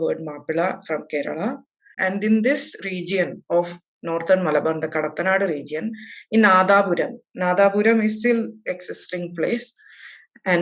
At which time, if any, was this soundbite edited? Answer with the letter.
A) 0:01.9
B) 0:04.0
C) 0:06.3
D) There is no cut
A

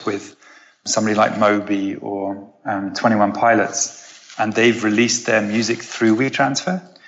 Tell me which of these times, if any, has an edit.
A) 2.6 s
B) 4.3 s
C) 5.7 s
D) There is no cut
D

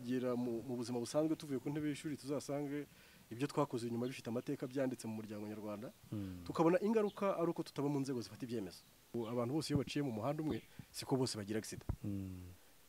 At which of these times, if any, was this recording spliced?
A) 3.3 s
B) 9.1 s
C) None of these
B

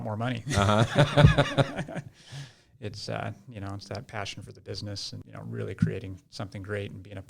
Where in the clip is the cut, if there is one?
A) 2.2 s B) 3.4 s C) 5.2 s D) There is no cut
C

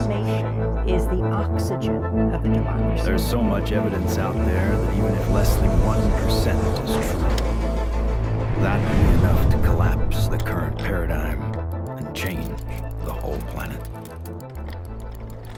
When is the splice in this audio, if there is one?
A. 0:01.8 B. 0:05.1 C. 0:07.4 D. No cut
D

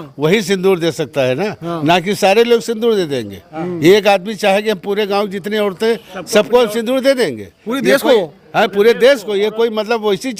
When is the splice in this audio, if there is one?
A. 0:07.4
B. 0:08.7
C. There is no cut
C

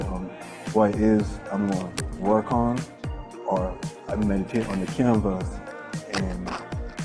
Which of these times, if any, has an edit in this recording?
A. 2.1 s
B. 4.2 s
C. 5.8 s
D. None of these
C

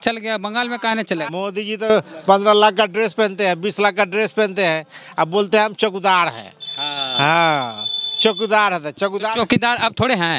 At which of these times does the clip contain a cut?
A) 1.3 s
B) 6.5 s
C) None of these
A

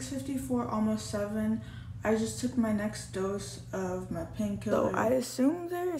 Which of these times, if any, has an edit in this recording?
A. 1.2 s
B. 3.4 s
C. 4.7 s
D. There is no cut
C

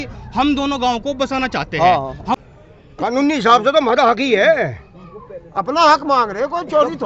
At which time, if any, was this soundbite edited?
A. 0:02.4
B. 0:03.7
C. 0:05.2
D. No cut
A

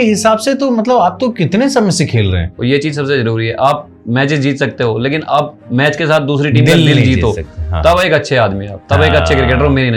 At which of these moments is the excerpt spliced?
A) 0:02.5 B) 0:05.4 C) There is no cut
A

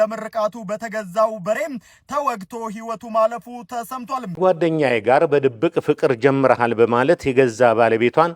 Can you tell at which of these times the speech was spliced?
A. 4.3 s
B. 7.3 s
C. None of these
A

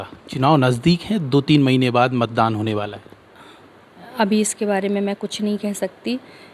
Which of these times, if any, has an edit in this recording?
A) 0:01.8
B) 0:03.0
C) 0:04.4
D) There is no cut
D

